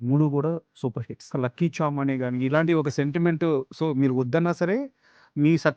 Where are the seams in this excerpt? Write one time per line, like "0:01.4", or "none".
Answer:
0:01.3